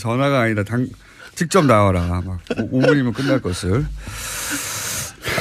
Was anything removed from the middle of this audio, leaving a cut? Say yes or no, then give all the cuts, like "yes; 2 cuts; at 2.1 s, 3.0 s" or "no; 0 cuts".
no; 0 cuts